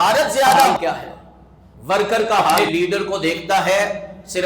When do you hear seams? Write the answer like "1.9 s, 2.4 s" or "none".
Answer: 0.7 s, 2.6 s